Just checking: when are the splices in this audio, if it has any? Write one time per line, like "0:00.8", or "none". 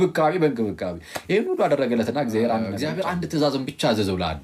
0:02.8